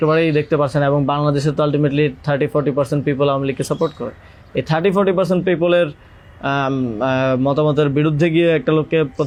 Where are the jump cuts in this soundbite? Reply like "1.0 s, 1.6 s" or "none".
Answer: none